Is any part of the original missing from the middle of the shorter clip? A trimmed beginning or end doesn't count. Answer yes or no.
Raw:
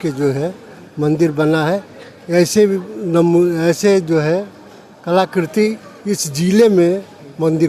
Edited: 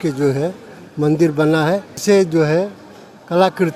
yes